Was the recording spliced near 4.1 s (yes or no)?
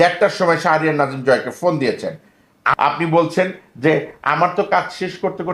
no